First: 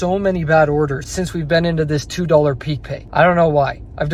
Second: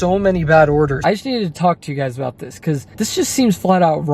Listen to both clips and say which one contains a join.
second; 1 cut; at 1.0 s

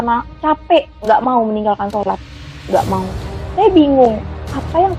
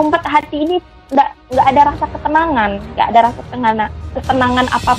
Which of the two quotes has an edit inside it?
first; 1 cut; at 0.9 s

